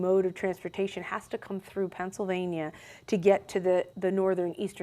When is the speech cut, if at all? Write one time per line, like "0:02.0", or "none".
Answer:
0:03.9